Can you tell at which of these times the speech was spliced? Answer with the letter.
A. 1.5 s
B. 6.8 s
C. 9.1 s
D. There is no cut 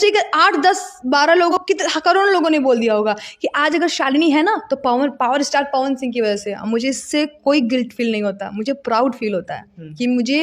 A